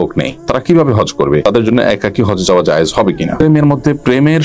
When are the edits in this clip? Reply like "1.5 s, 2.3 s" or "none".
1.4 s, 3.3 s